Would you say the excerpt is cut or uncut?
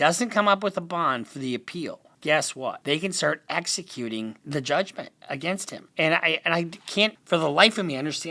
cut